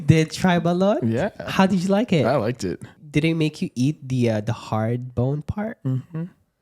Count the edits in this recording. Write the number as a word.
one